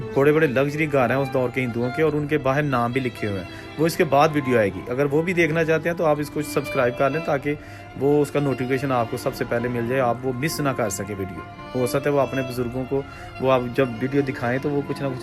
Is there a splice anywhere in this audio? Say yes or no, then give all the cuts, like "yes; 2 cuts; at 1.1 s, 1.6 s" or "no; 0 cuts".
no; 0 cuts